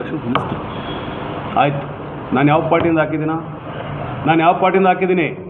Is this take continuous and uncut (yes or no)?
yes